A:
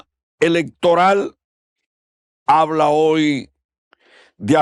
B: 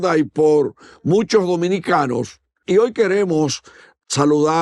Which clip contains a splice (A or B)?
B